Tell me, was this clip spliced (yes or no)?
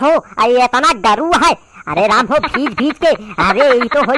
no